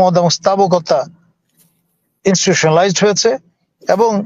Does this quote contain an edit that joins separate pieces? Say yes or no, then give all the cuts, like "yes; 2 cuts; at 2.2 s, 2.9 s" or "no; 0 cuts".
no; 0 cuts